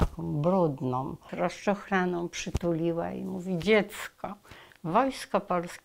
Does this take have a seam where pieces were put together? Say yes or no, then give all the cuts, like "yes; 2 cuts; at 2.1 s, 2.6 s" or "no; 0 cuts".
yes; 1 cut; at 1.2 s